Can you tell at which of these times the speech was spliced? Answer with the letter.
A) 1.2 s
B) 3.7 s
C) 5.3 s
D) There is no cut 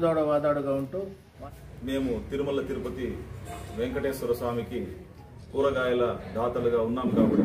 A